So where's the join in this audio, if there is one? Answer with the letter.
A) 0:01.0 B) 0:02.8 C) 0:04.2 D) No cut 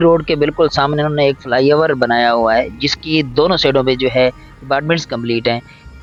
D